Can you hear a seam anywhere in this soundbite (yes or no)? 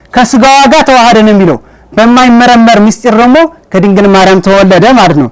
no